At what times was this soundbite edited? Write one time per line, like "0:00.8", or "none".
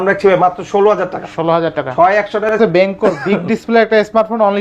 0:02.6